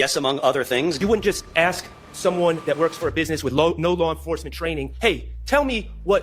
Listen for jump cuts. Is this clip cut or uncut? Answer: cut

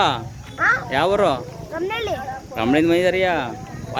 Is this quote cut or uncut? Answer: uncut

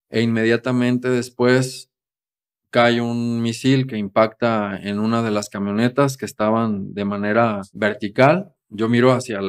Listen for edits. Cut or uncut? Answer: cut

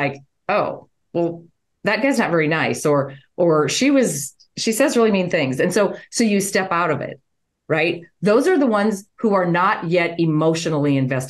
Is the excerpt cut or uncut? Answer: uncut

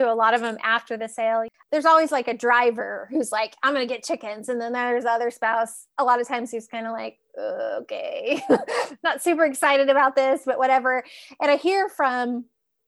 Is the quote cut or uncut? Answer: cut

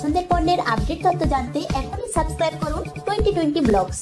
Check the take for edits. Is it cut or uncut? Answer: uncut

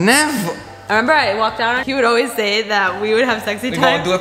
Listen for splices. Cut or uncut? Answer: cut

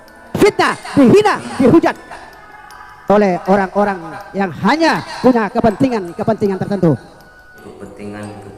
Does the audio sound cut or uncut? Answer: cut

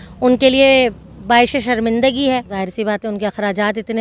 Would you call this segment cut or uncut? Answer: cut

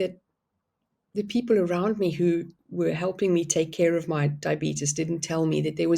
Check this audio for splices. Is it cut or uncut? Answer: uncut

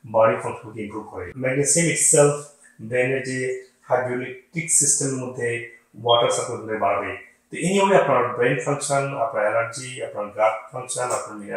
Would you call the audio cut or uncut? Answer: cut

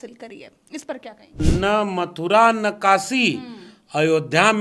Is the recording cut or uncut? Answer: cut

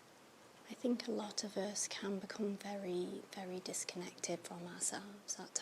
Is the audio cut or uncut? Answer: uncut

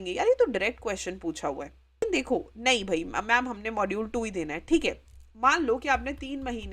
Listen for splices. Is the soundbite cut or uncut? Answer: cut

